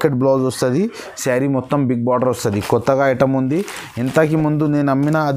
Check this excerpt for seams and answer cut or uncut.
uncut